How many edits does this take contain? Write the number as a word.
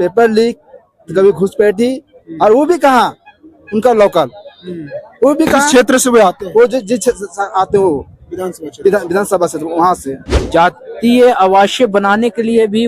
one